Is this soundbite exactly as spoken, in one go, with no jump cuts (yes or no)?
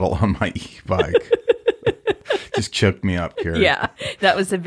no